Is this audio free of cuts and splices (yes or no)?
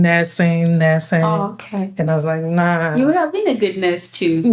yes